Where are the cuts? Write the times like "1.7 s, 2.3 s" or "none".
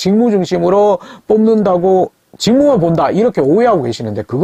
none